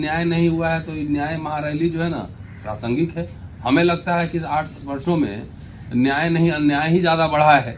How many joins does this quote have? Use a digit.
0